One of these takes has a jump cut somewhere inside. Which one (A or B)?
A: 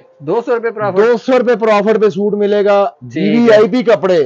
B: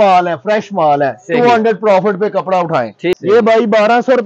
B